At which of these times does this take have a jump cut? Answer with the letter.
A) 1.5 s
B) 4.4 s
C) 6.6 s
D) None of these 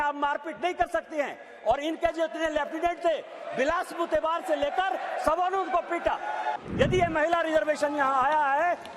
C